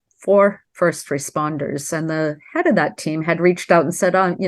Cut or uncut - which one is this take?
uncut